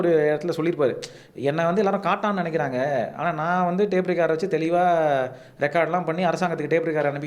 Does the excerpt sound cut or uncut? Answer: uncut